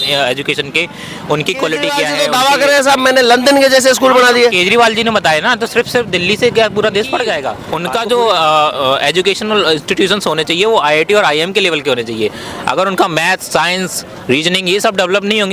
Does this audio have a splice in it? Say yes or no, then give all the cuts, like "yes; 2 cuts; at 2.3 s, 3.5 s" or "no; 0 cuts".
yes; 2 cuts; at 2.1 s, 7.6 s